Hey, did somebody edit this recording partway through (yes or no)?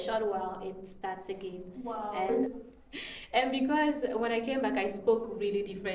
yes